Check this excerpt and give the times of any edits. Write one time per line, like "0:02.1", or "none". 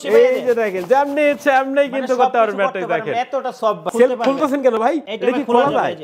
0:03.8
0:05.1